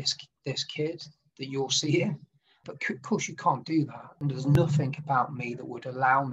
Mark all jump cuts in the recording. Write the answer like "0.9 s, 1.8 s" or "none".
4.2 s